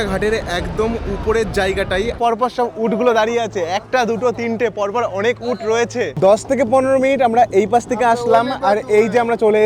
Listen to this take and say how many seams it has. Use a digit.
2